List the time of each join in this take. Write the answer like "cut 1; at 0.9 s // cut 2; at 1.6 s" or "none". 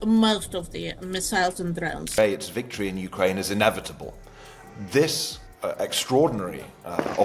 cut 1; at 2.1 s